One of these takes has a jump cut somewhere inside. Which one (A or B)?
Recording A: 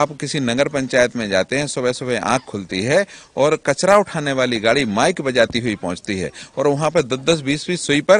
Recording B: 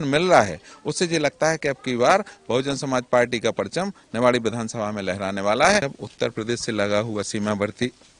B